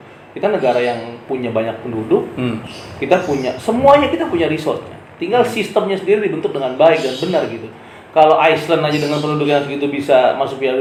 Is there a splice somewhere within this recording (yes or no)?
no